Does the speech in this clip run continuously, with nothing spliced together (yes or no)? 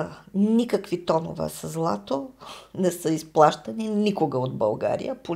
yes